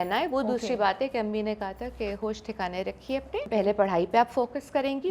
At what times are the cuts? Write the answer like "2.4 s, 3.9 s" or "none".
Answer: 3.5 s